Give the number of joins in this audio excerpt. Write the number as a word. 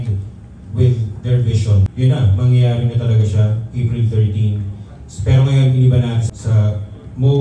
two